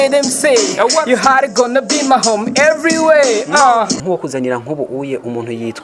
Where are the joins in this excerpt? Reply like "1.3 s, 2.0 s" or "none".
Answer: 4.0 s